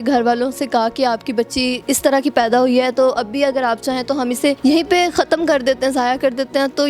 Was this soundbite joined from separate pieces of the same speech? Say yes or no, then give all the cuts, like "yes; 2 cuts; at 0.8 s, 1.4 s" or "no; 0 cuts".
yes; 2 cuts; at 1.8 s, 4.6 s